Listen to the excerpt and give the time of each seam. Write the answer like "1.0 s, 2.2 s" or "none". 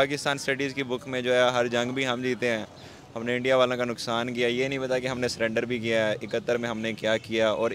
none